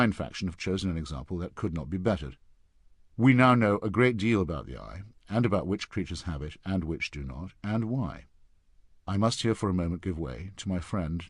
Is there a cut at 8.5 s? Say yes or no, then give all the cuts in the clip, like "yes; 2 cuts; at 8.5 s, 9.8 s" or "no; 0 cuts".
yes; 1 cut; at 8.5 s